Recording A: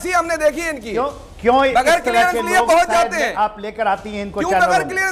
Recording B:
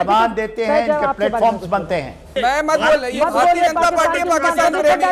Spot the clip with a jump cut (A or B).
B